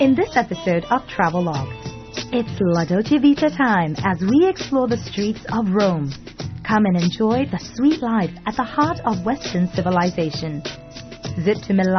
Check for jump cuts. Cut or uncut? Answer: uncut